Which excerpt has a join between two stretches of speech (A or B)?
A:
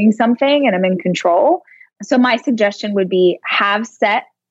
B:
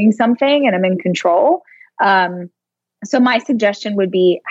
A